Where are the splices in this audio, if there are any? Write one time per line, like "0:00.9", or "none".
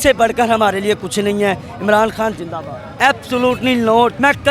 0:02.9